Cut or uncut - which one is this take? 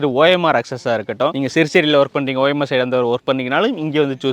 cut